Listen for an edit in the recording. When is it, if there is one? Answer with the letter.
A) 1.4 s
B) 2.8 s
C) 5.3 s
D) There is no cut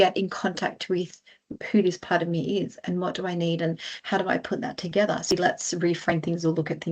C